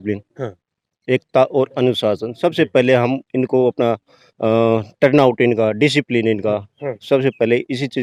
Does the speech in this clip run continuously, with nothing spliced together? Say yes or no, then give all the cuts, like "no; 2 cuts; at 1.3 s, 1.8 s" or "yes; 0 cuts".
yes; 0 cuts